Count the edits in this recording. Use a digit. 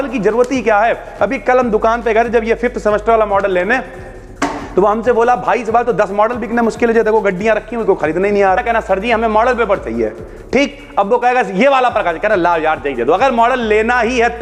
1